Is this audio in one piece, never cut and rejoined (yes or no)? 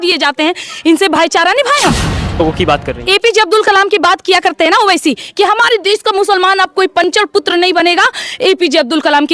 no